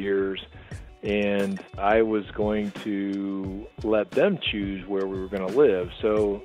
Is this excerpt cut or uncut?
cut